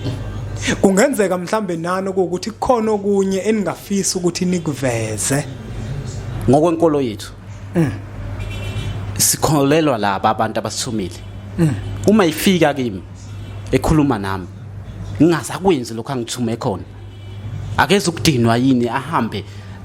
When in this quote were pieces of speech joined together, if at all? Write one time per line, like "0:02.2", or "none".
0:06.3